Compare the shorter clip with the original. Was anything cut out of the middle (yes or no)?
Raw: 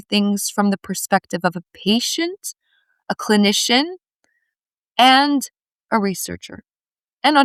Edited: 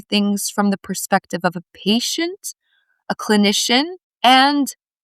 yes